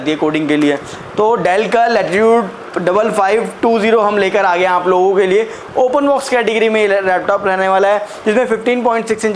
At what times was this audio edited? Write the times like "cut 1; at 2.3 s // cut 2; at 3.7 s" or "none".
none